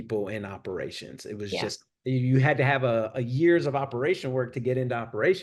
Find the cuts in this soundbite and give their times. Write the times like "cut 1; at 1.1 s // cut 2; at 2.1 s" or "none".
none